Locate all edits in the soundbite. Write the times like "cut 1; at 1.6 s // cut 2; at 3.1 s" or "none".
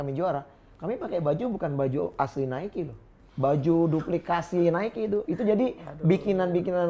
none